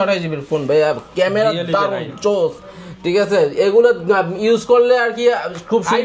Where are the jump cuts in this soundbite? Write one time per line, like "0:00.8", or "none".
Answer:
none